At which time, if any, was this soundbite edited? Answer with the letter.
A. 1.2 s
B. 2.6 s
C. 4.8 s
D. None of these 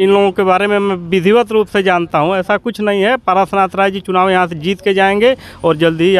D